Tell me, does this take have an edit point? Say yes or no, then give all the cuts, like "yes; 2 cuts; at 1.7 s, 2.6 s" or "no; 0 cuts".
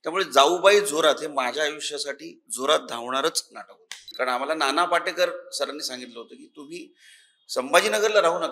yes; 1 cut; at 4.0 s